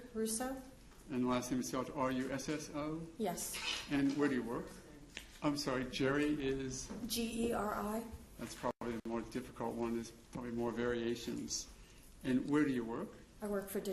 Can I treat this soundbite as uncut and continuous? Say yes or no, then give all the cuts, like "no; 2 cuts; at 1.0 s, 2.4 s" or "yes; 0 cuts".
yes; 0 cuts